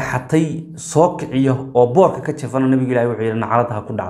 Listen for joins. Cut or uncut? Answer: uncut